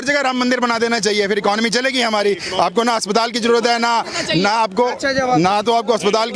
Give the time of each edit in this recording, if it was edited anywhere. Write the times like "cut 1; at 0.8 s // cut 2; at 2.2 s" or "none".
none

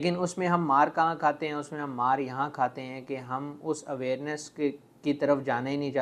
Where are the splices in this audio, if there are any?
none

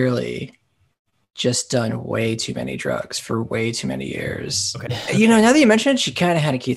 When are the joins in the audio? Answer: cut 1; at 4.9 s

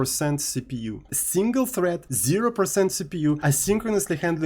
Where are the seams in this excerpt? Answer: cut 1; at 1.2 s // cut 2; at 2.1 s // cut 3; at 3.4 s

